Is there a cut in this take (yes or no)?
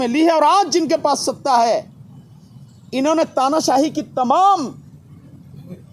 no